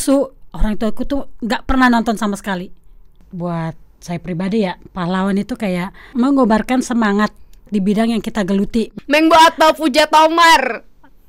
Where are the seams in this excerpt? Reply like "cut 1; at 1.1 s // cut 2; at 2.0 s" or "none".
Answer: cut 1; at 3.2 s // cut 2; at 6.1 s // cut 3; at 7.7 s // cut 4; at 8.9 s

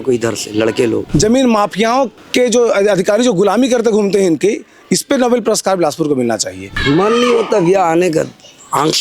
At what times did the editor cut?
cut 1; at 1.0 s // cut 2; at 2.2 s // cut 3; at 6.7 s

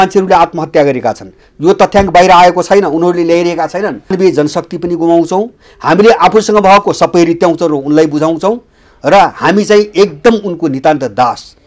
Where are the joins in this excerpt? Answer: cut 1; at 4.1 s

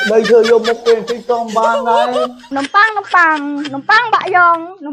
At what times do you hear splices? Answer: cut 1; at 2.5 s

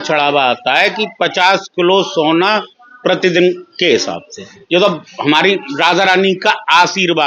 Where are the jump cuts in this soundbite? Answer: none

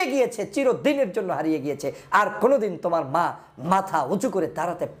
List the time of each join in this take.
none

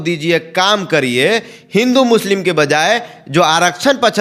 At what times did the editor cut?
none

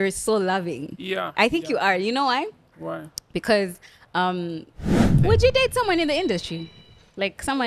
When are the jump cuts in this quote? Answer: cut 1; at 5.2 s

